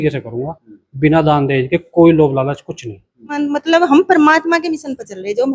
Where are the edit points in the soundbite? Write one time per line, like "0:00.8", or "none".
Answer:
0:03.4